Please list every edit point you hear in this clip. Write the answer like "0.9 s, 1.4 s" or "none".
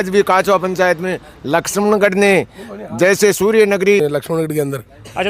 4.0 s

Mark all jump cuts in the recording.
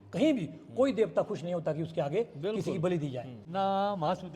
3.3 s

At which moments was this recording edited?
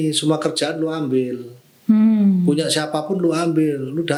none

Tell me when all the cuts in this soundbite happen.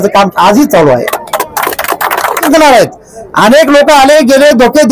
2.4 s

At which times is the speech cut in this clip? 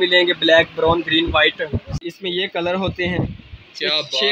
1.9 s

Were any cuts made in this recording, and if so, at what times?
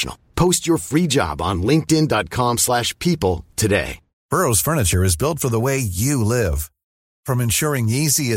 4.1 s

